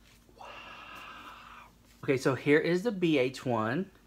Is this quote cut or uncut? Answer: cut